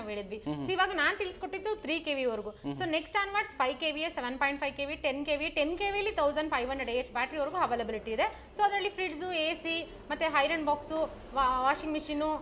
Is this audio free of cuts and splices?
yes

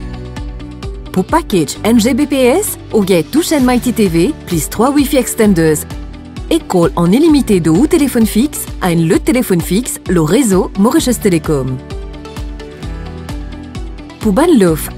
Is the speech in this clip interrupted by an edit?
no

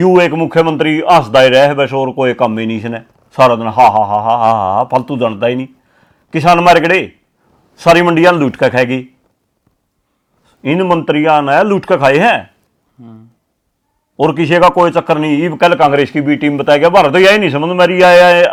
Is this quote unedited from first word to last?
yes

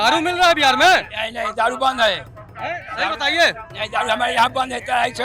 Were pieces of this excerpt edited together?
no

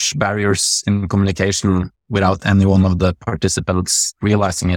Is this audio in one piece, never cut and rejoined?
yes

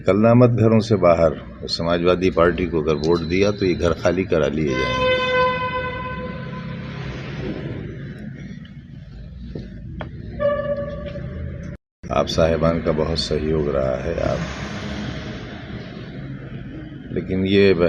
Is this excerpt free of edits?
yes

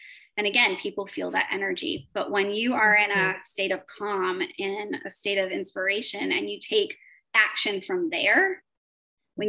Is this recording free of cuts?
yes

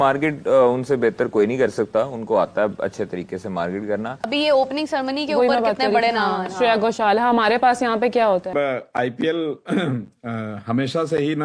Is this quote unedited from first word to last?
no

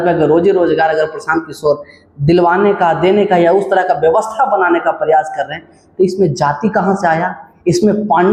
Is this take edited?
no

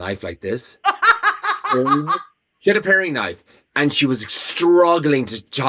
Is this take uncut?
yes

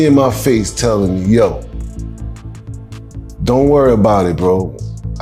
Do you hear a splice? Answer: no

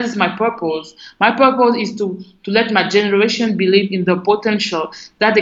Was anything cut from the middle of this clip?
no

